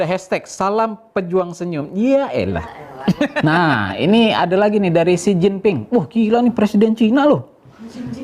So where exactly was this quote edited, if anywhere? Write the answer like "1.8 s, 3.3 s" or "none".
3.4 s